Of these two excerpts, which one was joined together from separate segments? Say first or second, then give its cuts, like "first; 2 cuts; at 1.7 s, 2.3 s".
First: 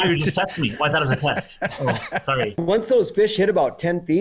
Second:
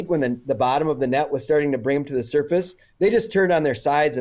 first; 1 cut; at 2.5 s